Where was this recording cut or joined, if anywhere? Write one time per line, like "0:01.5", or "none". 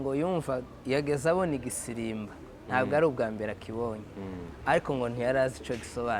none

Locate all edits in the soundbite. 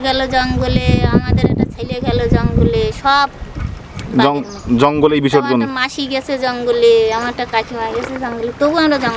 none

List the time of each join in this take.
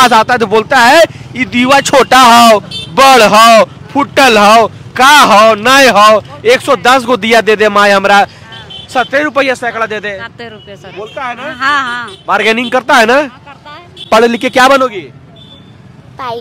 0:14.1

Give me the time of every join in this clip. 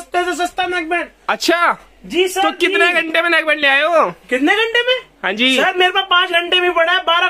none

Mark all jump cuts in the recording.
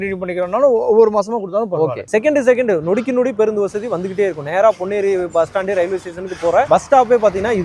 0:02.0

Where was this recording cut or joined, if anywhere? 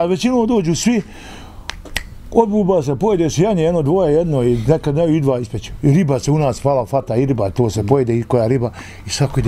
none

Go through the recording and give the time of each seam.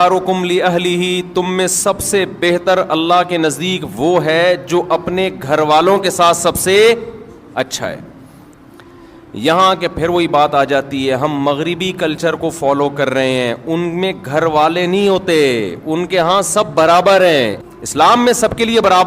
0:17.6

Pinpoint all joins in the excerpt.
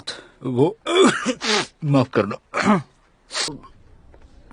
0:03.5

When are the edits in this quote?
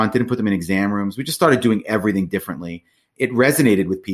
0:03.1

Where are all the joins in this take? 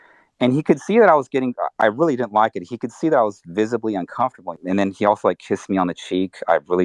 0:04.5

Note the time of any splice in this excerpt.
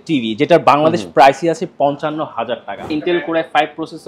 0:02.9

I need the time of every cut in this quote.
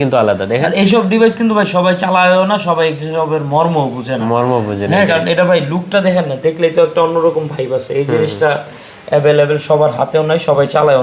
none

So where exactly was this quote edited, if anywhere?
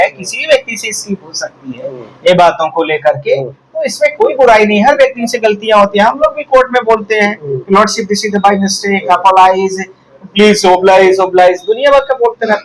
none

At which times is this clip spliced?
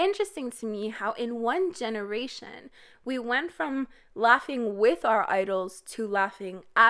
none

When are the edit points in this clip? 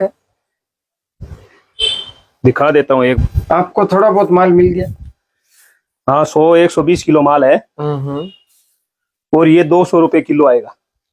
0:03.2

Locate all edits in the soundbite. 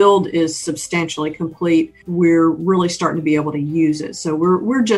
0:02.0

